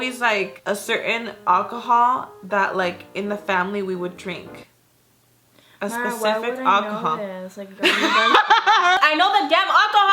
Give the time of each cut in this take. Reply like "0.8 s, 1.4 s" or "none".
9.0 s